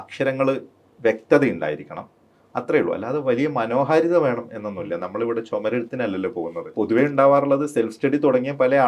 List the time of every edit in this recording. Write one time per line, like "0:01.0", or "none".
0:06.7

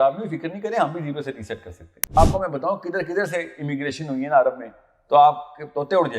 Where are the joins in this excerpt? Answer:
0:02.2

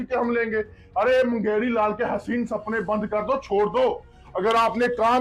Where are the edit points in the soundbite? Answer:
none

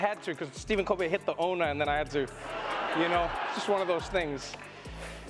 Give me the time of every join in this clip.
none

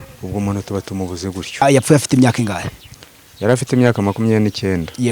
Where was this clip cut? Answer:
0:01.5

